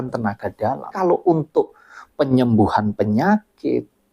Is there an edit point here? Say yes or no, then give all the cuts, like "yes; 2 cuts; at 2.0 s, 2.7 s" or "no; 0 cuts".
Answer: yes; 1 cut; at 0.9 s